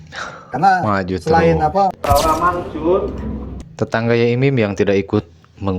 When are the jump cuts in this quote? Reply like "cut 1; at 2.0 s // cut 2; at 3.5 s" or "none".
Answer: cut 1; at 2.0 s